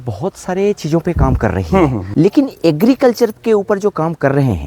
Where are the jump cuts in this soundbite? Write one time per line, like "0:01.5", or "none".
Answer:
0:02.0